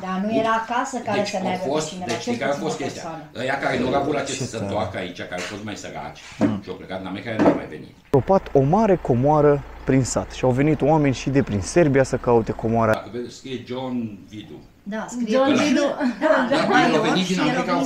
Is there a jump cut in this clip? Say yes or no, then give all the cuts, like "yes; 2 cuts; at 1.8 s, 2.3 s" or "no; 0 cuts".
yes; 2 cuts; at 8.1 s, 12.9 s